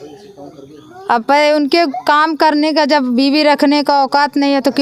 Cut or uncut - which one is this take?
uncut